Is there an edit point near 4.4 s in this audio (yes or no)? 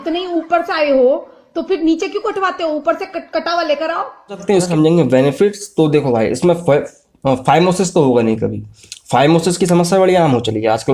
yes